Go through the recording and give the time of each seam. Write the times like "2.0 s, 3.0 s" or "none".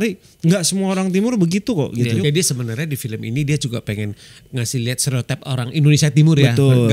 2.2 s

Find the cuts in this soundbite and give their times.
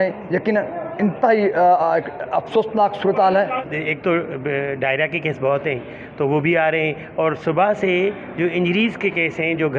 3.5 s

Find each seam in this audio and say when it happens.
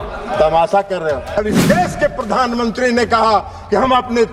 1.4 s

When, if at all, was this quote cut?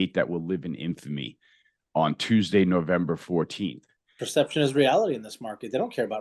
4.1 s

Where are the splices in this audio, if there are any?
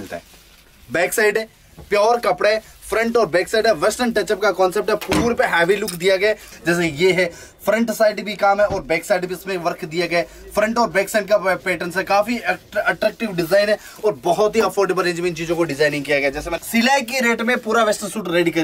6.5 s, 16.5 s

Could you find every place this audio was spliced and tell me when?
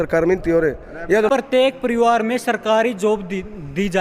1.3 s

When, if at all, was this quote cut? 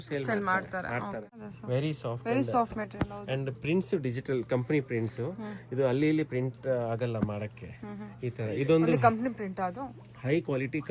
1.5 s

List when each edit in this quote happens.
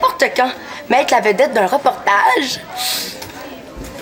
none

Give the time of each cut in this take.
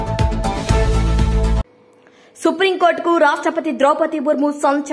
1.7 s

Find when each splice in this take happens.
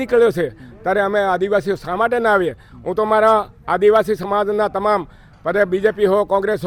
none

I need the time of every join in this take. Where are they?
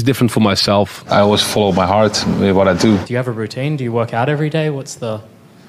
1.0 s, 3.1 s

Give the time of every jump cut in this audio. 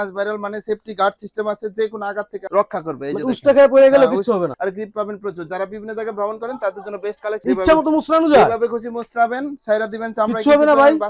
4.5 s, 7.4 s

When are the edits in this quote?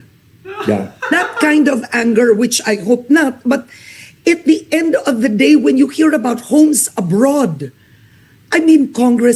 none

